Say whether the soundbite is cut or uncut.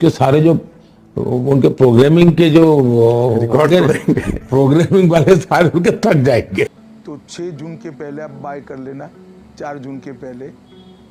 cut